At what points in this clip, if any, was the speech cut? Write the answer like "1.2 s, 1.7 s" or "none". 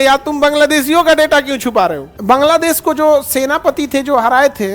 2.1 s